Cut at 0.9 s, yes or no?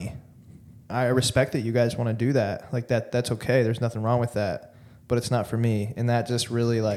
yes